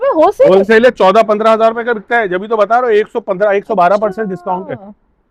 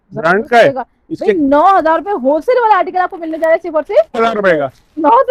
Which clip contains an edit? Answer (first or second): second